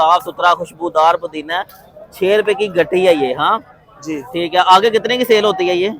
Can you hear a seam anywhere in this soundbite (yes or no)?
no